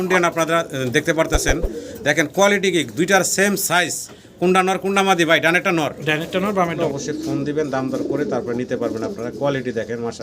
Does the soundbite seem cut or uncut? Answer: cut